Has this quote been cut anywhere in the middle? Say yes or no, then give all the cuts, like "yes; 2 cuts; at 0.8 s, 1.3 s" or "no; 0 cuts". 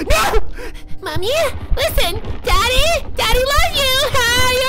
no; 0 cuts